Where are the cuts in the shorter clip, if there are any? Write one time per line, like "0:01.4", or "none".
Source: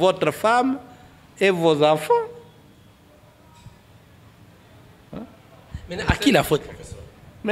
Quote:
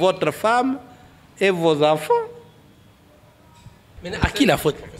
0:04.0